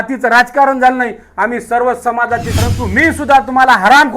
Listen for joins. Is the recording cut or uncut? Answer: cut